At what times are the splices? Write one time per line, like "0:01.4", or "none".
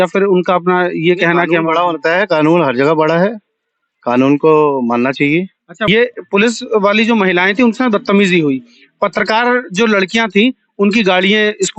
0:05.8